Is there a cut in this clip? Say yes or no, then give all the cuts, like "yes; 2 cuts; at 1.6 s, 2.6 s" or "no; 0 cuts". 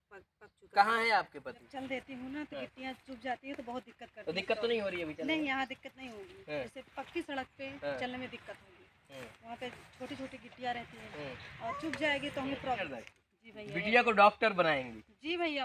yes; 2 cuts; at 1.6 s, 12.8 s